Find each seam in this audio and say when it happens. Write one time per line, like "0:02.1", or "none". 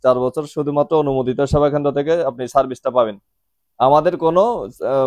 none